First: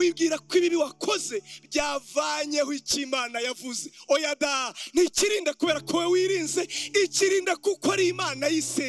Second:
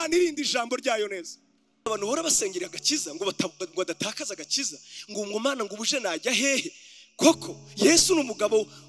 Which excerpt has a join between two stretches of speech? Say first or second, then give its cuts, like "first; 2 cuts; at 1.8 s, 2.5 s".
second; 1 cut; at 1.9 s